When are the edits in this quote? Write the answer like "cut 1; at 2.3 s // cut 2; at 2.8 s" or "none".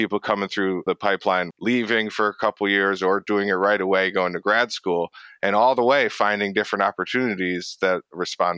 cut 1; at 1.1 s